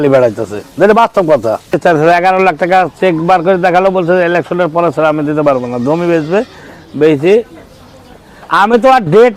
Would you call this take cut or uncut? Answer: cut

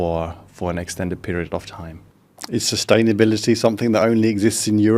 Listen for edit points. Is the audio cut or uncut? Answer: uncut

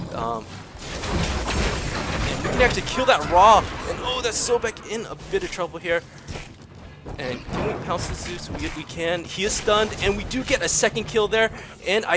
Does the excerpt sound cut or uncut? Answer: uncut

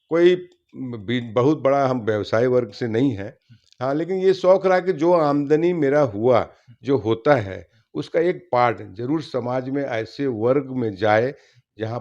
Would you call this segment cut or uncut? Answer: uncut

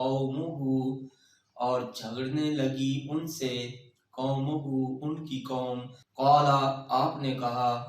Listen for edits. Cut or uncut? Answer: cut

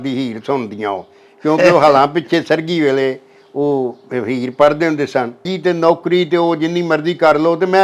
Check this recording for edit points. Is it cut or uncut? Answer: cut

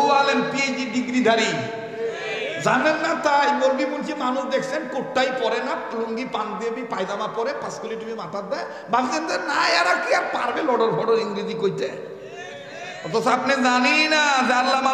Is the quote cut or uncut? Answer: uncut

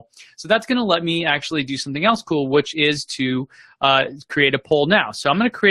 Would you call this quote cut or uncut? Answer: cut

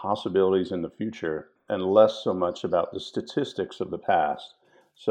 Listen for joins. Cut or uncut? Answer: cut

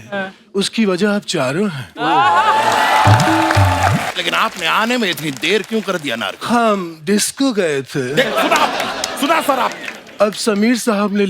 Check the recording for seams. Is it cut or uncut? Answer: cut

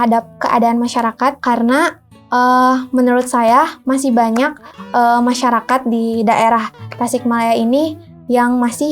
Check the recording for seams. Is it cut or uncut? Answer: cut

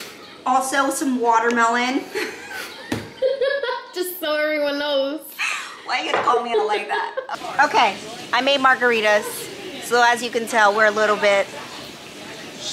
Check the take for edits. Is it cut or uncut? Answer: cut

